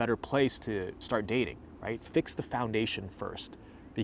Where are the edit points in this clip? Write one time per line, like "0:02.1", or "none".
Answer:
0:01.0